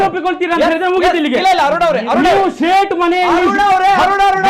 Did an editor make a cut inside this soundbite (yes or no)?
no